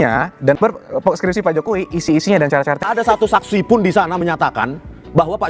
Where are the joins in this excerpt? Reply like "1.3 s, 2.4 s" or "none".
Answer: 2.9 s